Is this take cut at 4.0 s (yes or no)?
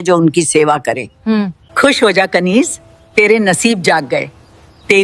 no